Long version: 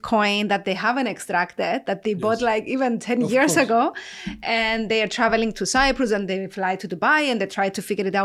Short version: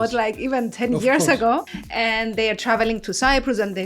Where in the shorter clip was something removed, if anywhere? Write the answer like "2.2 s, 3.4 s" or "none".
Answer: 1.8 s